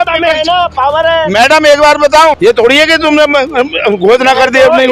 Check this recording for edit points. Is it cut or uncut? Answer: cut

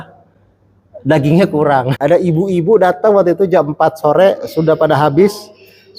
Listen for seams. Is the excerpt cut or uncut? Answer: cut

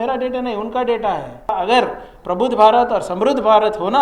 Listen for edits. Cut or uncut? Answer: cut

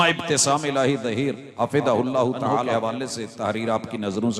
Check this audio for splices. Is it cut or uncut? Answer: cut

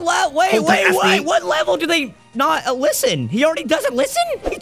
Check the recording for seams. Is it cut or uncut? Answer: uncut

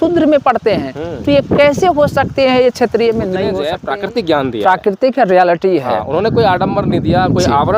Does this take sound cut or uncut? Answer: cut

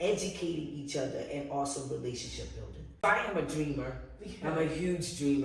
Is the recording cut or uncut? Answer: cut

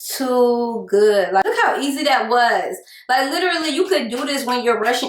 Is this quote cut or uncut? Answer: cut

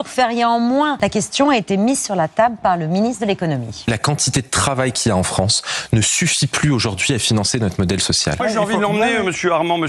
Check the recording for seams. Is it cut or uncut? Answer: cut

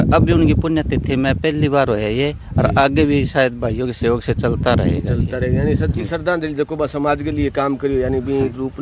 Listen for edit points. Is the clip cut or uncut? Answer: uncut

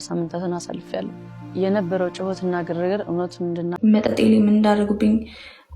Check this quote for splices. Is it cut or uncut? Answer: cut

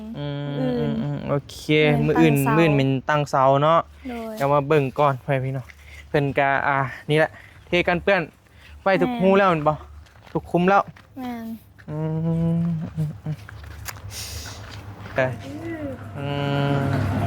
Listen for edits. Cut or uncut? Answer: cut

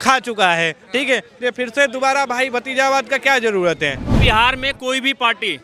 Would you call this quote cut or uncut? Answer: cut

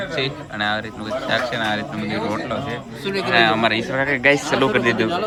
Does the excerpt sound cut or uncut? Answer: uncut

